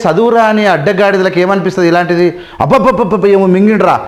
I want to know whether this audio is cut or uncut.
uncut